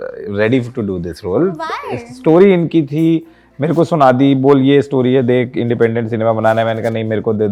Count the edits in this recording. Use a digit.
0